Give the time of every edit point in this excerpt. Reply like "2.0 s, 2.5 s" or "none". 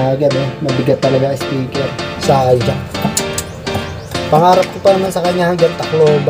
2.1 s